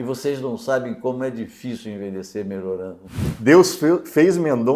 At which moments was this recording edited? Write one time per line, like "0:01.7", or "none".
0:03.3